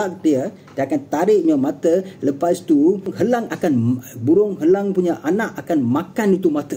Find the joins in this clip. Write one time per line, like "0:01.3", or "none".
0:03.1